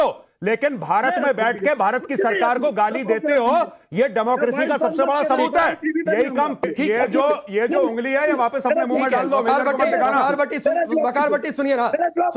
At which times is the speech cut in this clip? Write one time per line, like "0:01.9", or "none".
0:06.6